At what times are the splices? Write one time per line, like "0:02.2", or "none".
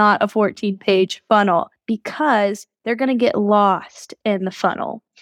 0:01.8

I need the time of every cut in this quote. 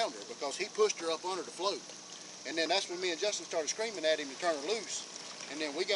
none

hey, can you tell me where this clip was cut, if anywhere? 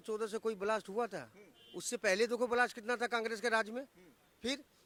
none

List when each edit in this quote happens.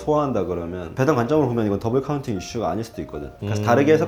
none

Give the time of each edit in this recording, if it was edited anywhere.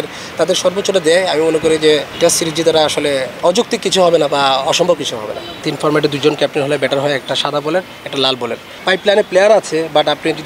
0:02.1
0:03.3
0:05.6
0:08.8

